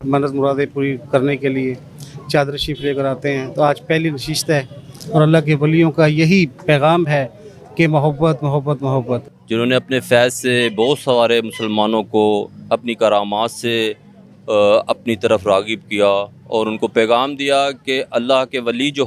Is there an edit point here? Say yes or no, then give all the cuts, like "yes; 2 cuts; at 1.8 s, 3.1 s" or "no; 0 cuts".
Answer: yes; 2 cuts; at 4.9 s, 9.3 s